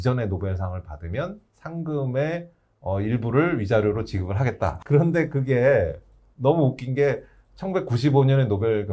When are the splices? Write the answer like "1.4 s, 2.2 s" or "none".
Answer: 4.8 s